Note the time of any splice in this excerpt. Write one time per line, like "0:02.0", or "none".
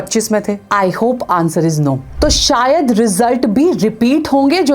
0:02.1